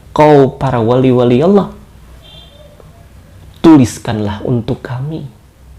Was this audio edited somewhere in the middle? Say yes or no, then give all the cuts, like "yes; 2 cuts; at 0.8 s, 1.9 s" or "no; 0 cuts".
no; 0 cuts